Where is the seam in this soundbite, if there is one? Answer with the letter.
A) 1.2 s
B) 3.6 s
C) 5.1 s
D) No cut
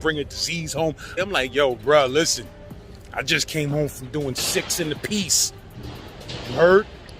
A